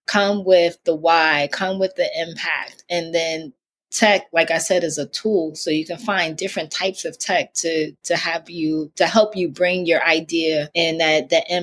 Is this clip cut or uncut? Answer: cut